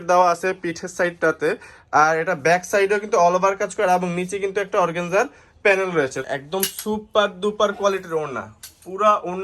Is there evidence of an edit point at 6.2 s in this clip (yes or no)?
yes